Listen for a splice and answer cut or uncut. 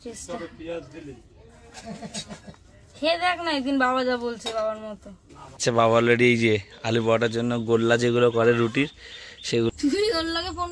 cut